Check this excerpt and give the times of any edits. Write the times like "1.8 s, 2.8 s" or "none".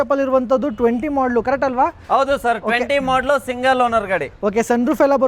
none